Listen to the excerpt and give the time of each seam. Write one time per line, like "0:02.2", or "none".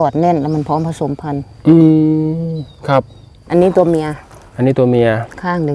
0:03.4